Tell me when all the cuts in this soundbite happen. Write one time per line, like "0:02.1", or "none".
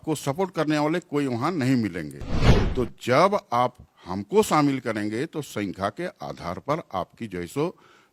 none